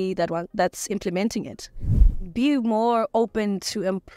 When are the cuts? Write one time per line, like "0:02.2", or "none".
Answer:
0:01.9